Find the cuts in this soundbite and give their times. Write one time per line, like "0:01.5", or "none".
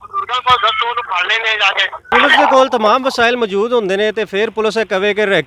0:02.1